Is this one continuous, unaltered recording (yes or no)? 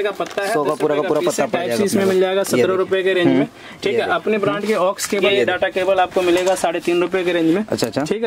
no